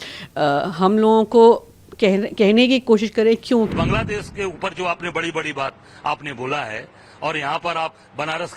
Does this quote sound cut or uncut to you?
cut